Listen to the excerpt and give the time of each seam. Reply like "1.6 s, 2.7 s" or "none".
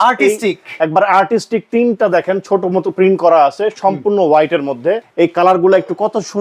5.1 s